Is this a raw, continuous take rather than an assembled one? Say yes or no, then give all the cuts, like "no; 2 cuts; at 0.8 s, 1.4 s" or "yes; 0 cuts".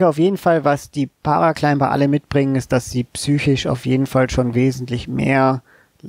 yes; 0 cuts